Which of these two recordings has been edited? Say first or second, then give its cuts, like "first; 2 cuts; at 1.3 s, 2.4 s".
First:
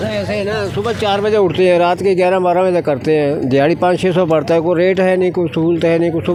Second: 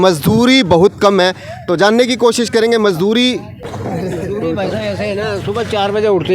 second; 1 cut; at 3.7 s